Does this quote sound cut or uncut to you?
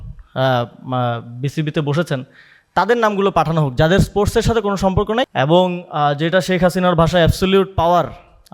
cut